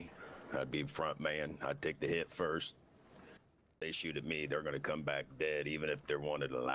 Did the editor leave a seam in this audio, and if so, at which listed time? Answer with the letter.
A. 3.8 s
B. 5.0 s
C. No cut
A